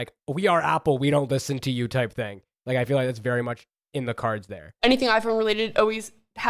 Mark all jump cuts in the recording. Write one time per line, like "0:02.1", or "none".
0:04.8